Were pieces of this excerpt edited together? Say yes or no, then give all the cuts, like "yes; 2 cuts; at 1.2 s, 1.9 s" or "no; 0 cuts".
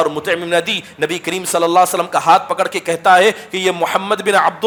no; 0 cuts